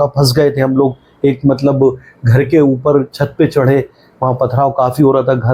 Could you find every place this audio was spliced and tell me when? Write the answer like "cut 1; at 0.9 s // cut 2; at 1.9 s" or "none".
none